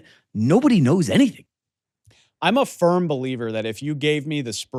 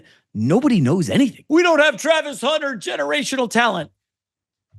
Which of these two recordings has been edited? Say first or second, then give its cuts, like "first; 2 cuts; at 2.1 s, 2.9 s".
second; 1 cut; at 1.4 s